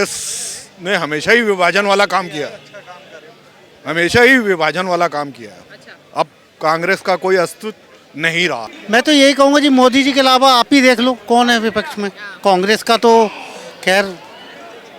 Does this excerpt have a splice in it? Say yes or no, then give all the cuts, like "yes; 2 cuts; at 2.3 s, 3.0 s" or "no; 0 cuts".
yes; 1 cut; at 8.7 s